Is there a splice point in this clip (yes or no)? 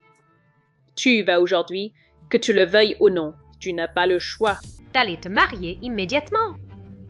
yes